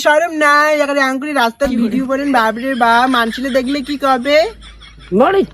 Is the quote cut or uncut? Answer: uncut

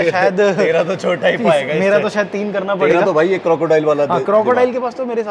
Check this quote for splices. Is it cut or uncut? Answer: uncut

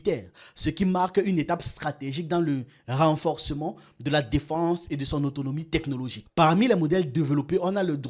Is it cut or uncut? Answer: cut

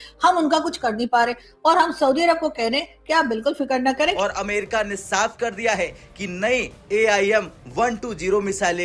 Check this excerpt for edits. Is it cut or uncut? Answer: cut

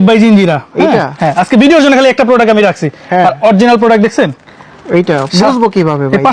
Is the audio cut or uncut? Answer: uncut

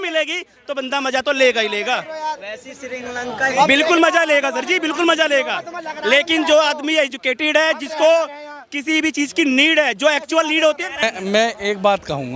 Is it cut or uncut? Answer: uncut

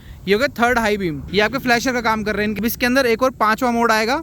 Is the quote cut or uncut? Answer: cut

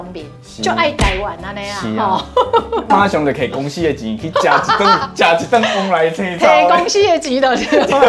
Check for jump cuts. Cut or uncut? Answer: uncut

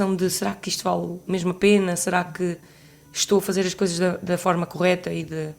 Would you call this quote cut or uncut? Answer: uncut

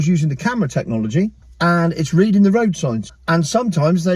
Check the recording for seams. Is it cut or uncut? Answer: cut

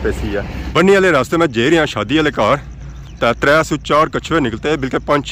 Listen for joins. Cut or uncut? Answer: uncut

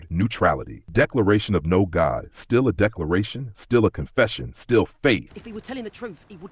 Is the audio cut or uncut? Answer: cut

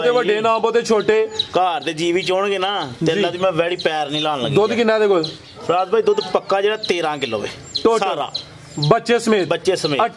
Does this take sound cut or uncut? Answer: uncut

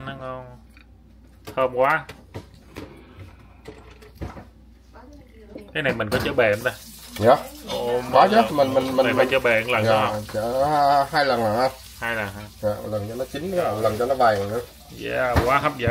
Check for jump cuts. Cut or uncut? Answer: uncut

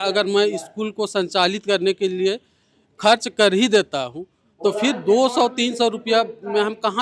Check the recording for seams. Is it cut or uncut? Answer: uncut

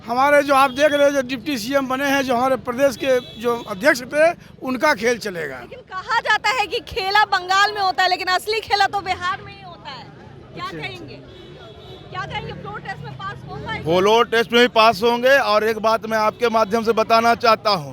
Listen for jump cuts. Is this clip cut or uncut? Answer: uncut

